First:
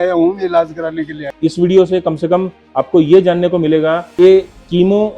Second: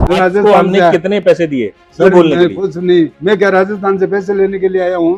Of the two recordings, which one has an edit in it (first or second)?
first